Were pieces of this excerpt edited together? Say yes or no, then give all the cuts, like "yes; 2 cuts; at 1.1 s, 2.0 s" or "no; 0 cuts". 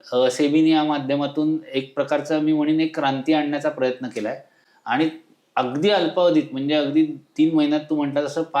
no; 0 cuts